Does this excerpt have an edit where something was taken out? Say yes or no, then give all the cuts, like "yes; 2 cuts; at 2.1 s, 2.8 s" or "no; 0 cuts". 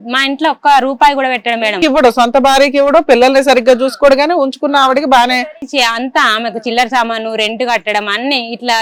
no; 0 cuts